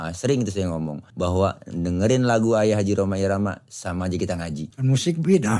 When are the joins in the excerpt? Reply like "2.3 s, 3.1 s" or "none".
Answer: 1.0 s, 4.7 s